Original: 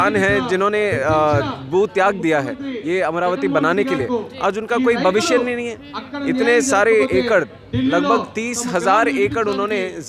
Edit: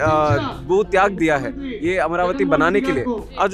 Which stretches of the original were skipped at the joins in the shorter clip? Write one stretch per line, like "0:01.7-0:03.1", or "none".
none